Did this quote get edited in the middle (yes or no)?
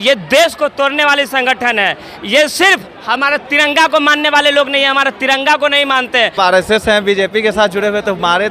yes